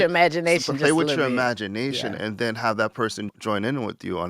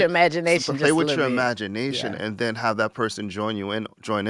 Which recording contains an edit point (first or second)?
first